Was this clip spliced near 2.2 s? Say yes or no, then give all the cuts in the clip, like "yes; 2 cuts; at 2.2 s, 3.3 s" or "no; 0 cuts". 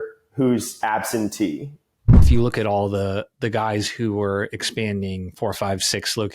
yes; 1 cut; at 2.2 s